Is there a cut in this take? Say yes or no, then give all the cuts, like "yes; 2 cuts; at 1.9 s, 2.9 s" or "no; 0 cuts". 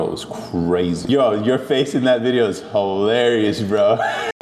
yes; 1 cut; at 1.1 s